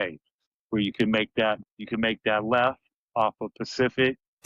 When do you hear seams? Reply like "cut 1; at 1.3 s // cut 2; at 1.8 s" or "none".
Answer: none